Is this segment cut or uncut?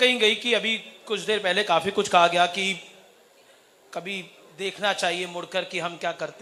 uncut